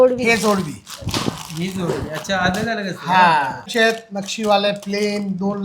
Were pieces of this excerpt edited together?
yes; 1 cut; at 3.7 s

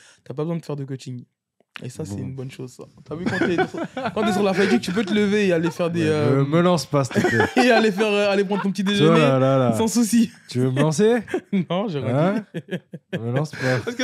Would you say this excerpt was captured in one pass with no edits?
yes; 0 cuts

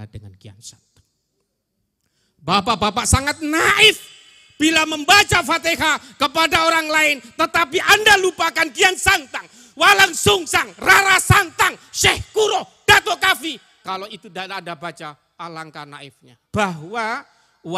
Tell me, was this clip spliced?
yes; 1 cut; at 16.4 s

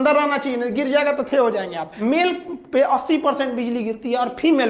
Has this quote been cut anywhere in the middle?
yes; 1 cut; at 1.9 s

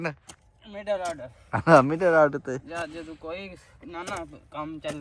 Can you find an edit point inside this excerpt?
no; 0 cuts

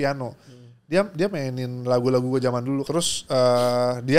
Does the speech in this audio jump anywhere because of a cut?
yes; 1 cut; at 2.8 s

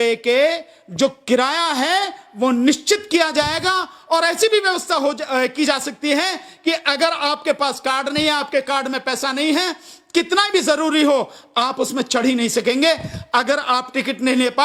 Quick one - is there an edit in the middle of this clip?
no; 0 cuts

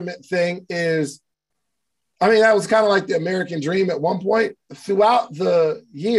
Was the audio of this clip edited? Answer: yes; 1 cut; at 4.7 s

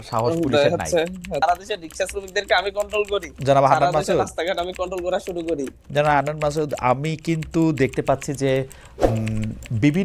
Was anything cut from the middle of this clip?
yes; 1 cut; at 1.4 s

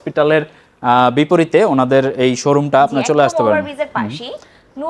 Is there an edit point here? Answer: no; 0 cuts

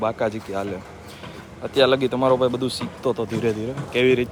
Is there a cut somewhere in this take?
no; 0 cuts

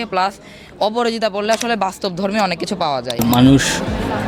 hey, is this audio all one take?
no; 1 cut; at 3.2 s

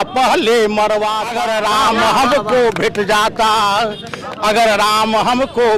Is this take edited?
yes; 1 cut; at 1.3 s

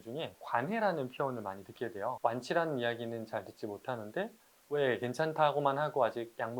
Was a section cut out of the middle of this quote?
yes; 1 cut; at 4.6 s

